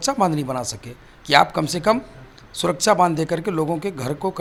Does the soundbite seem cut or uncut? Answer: uncut